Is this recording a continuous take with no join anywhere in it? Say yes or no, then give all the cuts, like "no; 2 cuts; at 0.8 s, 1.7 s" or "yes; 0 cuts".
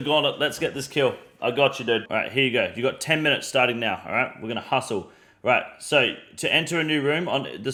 yes; 0 cuts